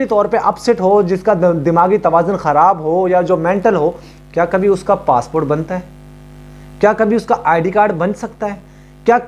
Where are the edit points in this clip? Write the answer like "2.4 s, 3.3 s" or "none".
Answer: none